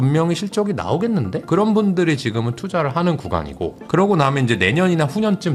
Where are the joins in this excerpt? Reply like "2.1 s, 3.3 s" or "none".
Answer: 1.4 s